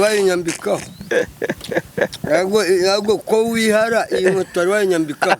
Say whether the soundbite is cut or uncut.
uncut